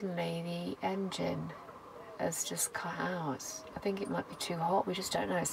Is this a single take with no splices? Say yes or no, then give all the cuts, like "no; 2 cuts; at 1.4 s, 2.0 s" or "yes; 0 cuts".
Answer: yes; 0 cuts